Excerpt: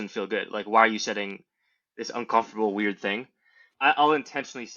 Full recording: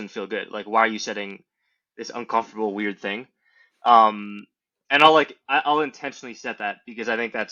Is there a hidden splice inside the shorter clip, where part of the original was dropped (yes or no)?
yes